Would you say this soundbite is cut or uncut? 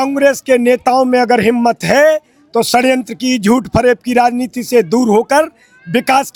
uncut